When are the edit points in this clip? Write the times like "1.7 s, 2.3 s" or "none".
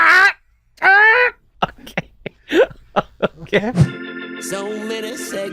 1.4 s, 3.9 s